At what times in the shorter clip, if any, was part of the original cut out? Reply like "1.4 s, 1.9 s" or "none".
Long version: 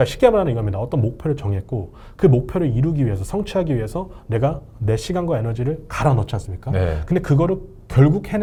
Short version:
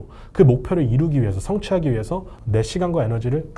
2.3 s